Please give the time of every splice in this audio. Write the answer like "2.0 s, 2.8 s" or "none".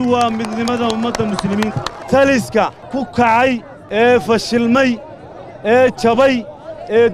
1.9 s, 2.8 s, 3.8 s